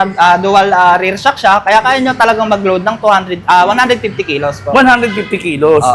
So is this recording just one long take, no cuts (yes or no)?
yes